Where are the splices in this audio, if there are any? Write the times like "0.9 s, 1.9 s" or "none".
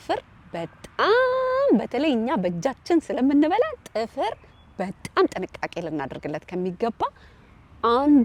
none